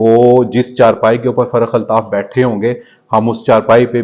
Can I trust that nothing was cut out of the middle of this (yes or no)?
yes